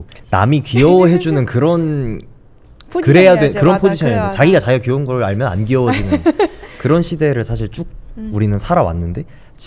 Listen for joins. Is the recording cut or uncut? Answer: uncut